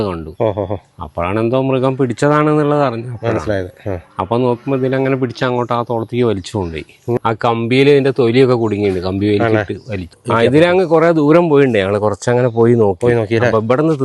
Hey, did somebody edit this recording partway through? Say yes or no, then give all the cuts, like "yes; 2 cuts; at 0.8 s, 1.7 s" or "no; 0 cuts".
yes; 2 cuts; at 7.2 s, 10.2 s